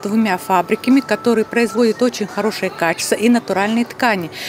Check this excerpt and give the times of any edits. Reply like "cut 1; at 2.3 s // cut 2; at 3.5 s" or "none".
none